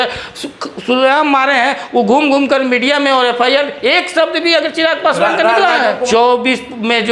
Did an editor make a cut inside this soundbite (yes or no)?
yes